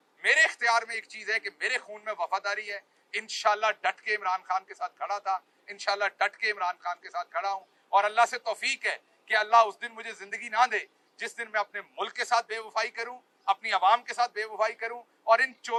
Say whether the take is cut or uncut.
uncut